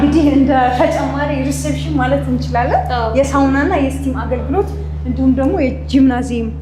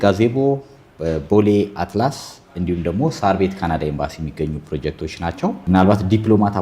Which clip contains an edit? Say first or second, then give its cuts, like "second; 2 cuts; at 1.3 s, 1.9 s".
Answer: second; 1 cut; at 5.6 s